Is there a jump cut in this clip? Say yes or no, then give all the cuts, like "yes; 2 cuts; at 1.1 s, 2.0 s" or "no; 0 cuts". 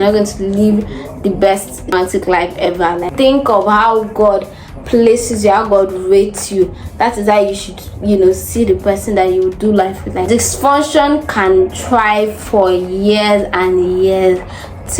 yes; 3 cuts; at 1.9 s, 3.0 s, 10.3 s